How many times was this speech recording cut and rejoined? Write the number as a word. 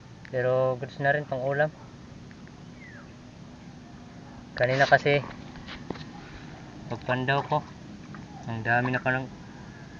zero